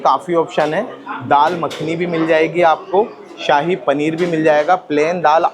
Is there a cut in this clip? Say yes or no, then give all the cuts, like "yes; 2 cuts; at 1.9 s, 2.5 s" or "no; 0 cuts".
no; 0 cuts